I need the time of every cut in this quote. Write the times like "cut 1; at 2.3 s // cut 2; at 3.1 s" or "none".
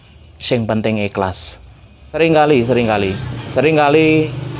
cut 1; at 2.2 s

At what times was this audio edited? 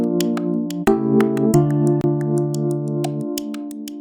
none

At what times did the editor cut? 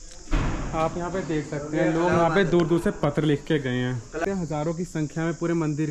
cut 1; at 4.2 s

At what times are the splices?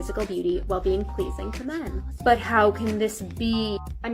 cut 1; at 2.7 s

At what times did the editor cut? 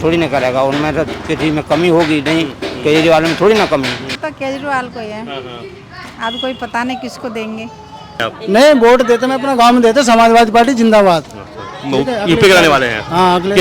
cut 1; at 4.2 s // cut 2; at 8.1 s

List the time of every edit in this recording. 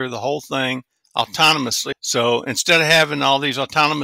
cut 1; at 1.9 s

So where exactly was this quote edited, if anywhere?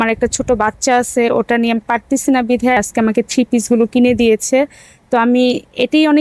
cut 1; at 2.8 s

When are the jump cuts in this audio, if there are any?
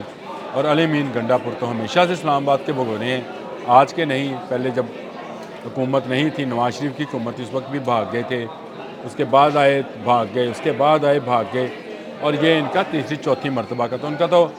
none

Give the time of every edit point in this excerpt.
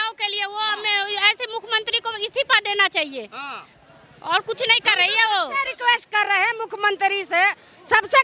none

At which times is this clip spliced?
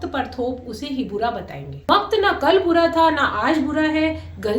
cut 1; at 1.7 s

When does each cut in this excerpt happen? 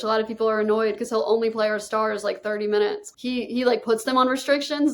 cut 1; at 3.0 s

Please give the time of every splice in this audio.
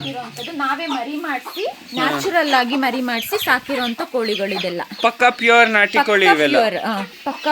none

